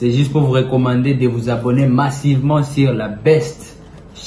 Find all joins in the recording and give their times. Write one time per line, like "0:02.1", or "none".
none